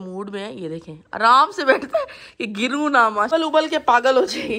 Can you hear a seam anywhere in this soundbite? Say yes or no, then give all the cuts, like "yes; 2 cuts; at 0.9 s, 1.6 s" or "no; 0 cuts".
yes; 1 cut; at 3.3 s